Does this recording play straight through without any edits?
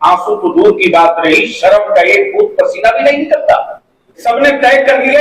no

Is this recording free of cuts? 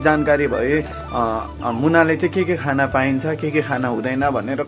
yes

